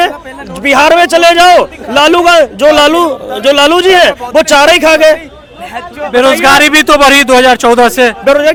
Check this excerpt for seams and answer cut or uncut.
uncut